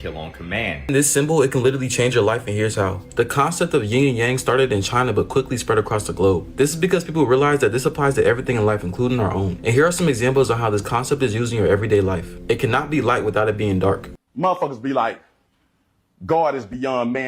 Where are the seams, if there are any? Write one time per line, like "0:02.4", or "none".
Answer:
0:00.9
0:14.3